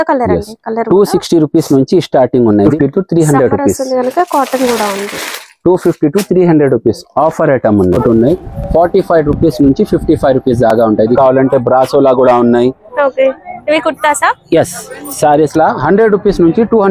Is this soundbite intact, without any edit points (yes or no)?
no